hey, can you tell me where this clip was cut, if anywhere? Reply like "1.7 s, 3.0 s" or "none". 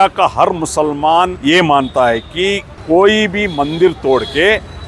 1.4 s, 2.7 s